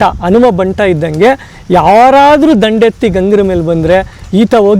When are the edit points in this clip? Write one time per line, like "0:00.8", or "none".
none